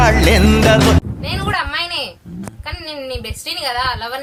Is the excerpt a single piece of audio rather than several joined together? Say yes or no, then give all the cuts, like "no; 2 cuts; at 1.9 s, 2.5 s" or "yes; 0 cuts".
yes; 0 cuts